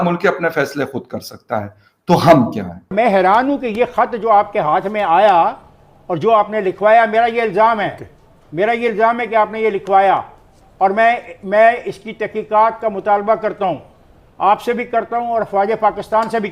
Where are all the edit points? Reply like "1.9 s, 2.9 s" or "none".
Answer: 2.9 s